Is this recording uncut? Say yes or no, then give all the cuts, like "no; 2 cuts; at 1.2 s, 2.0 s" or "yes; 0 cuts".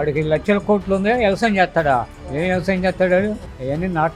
yes; 0 cuts